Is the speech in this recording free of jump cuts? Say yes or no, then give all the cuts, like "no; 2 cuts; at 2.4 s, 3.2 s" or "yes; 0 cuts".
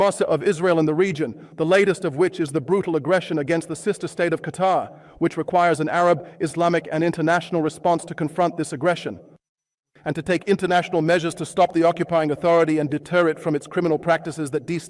yes; 0 cuts